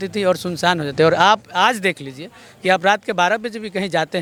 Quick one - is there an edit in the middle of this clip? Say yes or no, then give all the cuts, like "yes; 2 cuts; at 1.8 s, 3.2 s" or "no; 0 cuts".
no; 0 cuts